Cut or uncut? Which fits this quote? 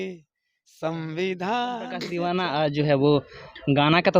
cut